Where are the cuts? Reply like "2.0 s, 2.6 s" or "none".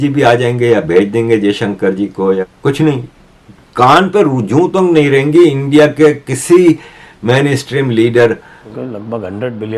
2.4 s, 8.6 s